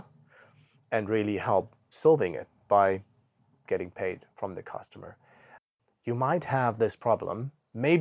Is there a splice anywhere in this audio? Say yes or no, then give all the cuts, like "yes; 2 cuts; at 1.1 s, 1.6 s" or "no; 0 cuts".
yes; 1 cut; at 5.6 s